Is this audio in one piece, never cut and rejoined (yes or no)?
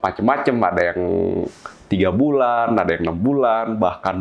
yes